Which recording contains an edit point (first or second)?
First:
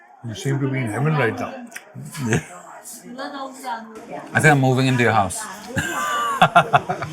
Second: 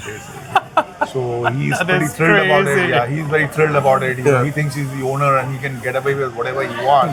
first